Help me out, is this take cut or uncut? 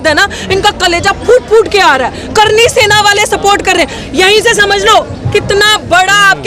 uncut